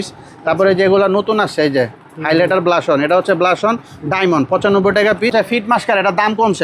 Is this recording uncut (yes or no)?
no